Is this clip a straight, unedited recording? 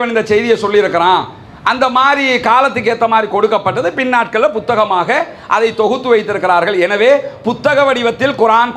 yes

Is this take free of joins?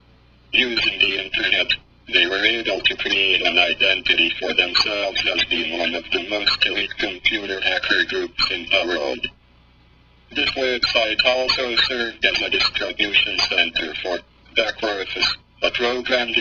yes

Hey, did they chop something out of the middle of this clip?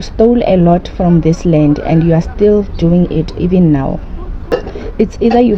yes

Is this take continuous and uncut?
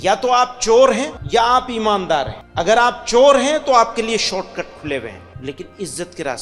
no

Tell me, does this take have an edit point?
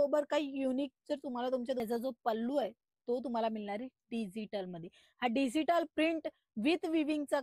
yes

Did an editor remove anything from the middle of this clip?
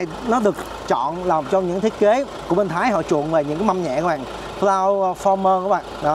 no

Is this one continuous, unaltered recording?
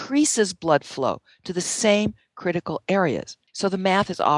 no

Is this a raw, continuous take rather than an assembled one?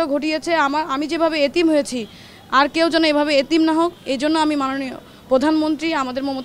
yes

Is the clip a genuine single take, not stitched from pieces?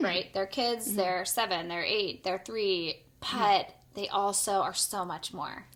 yes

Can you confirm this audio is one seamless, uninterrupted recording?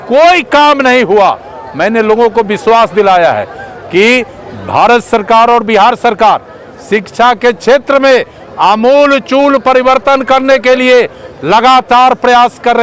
yes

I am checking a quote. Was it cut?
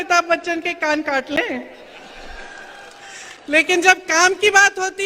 no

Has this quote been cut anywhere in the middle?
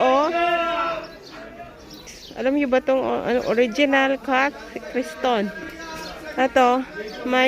yes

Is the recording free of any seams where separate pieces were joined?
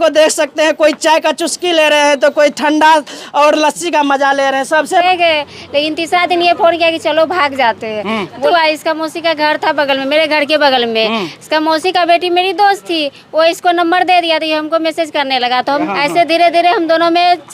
no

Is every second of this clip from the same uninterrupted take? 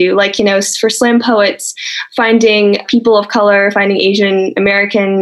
no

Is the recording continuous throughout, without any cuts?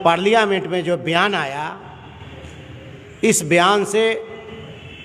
yes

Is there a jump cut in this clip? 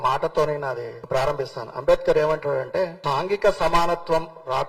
yes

